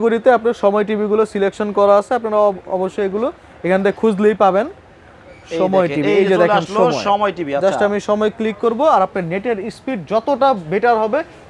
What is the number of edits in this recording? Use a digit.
0